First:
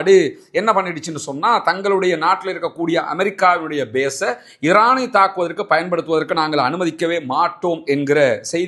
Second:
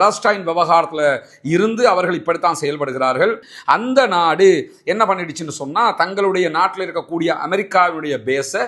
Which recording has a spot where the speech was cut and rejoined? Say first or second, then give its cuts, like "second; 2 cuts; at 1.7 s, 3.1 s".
second; 1 cut; at 3.4 s